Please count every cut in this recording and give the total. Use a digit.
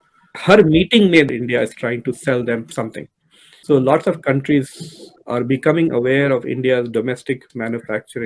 2